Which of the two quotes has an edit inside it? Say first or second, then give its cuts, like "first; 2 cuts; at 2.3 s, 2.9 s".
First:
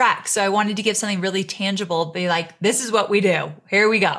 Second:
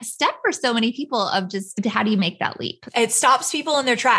second; 2 cuts; at 1.7 s, 2.8 s